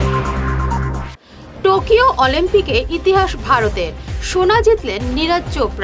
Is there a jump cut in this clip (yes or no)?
yes